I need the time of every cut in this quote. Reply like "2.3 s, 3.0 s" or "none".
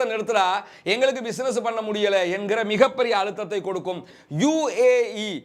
4.1 s